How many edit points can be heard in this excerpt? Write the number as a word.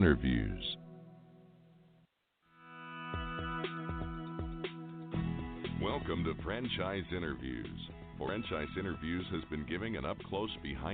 one